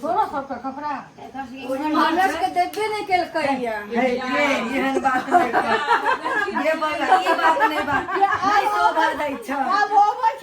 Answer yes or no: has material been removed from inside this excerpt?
no